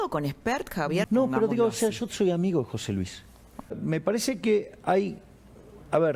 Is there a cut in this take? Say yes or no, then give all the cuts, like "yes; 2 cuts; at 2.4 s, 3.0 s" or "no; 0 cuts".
yes; 2 cuts; at 1.1 s, 3.7 s